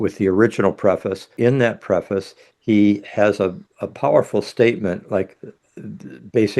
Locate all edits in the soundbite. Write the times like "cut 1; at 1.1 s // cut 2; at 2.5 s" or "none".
cut 1; at 1.3 s